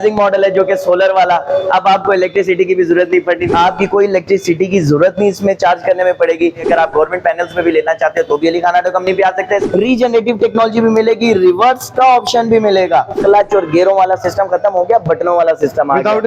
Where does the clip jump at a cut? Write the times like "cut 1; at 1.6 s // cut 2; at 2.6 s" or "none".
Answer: cut 1; at 3.5 s // cut 2; at 6.6 s // cut 3; at 9.6 s // cut 4; at 13.2 s